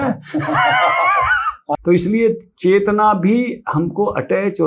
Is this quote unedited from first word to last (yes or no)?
no